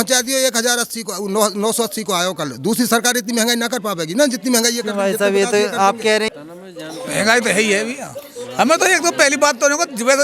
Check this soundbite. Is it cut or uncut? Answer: cut